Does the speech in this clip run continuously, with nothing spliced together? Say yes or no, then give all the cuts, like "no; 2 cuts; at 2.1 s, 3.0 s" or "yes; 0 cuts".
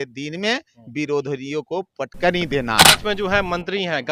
no; 1 cut; at 3.0 s